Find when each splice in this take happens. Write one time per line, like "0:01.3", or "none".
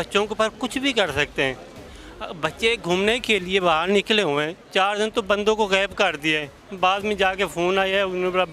0:04.6